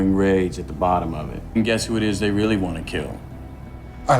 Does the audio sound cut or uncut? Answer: cut